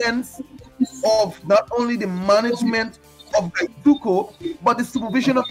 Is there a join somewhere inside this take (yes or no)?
no